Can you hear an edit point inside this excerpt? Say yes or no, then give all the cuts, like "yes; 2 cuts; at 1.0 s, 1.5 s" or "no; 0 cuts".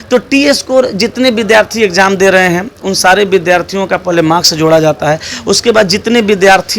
no; 0 cuts